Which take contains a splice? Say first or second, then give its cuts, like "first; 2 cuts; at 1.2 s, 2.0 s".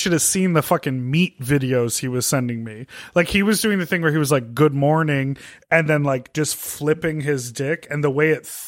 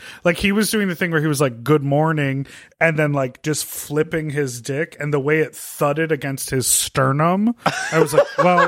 first; 1 cut; at 1.4 s